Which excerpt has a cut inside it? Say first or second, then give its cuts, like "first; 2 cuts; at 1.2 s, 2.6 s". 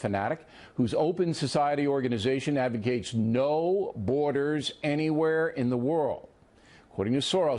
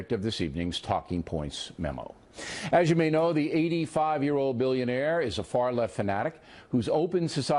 first; 1 cut; at 4.2 s